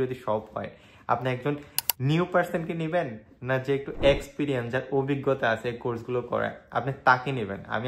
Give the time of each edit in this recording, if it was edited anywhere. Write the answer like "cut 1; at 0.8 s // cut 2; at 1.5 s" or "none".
none